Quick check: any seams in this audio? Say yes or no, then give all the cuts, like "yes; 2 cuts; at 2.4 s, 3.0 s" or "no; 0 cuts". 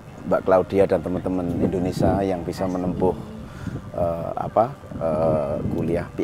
no; 0 cuts